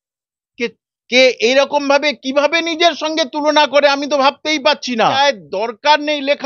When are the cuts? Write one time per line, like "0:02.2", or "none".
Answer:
0:05.0